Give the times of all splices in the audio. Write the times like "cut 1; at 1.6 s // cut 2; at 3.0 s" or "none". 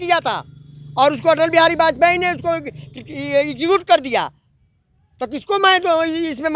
none